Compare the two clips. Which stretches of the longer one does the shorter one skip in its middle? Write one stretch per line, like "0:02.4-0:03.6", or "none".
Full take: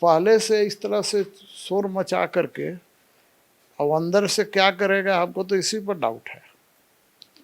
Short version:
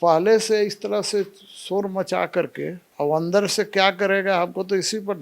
0:02.8-0:03.6